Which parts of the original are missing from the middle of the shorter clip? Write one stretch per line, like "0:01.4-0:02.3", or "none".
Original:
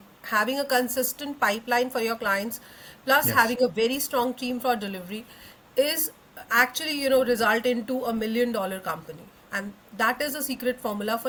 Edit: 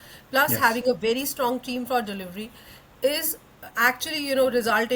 none